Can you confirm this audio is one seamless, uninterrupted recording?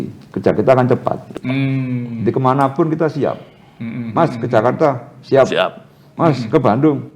yes; 0 cuts

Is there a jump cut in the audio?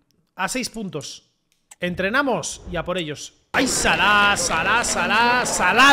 no; 0 cuts

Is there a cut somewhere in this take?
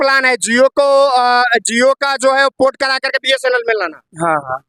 no; 0 cuts

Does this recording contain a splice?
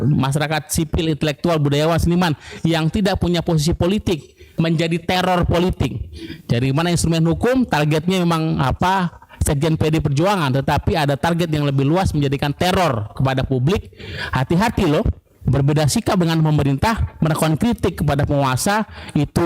yes; 1 cut; at 4.4 s

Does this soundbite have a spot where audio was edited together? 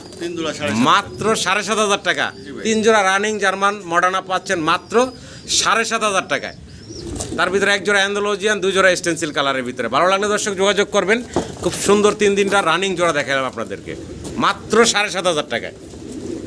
no; 0 cuts

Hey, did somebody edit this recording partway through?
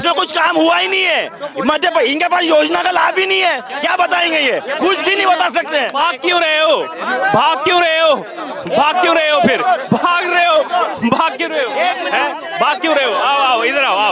no; 0 cuts

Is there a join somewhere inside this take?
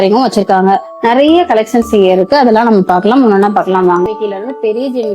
yes; 1 cut; at 4.1 s

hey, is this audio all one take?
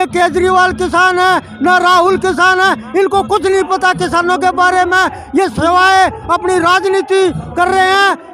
yes; 0 cuts

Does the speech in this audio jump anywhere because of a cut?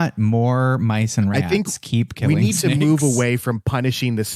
no; 0 cuts

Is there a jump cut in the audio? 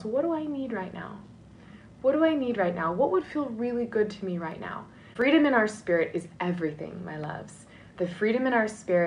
yes; 1 cut; at 5.1 s

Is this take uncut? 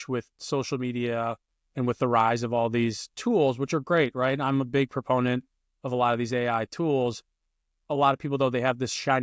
yes; 0 cuts

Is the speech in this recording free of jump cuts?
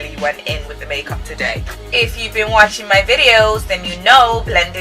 no; 1 cut; at 1.7 s

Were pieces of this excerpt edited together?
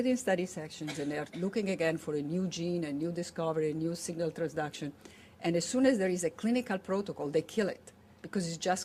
no; 0 cuts

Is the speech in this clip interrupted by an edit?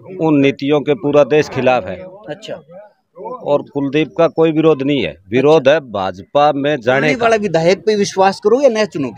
yes; 1 cut; at 7.2 s

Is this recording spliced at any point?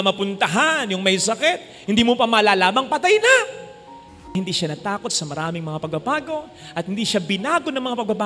yes; 1 cut; at 4.2 s

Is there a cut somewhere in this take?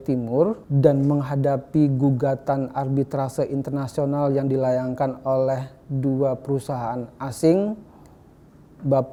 no; 0 cuts

